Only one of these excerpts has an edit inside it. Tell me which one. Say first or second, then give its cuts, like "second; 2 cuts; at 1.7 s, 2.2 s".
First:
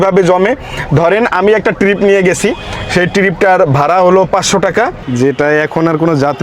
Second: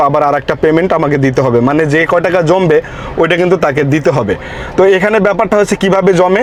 first; 1 cut; at 5.0 s